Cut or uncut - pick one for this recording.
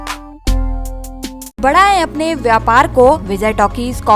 cut